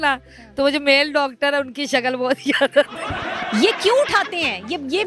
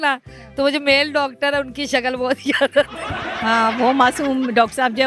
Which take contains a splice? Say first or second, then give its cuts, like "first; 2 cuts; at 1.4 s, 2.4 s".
first; 1 cut; at 3.4 s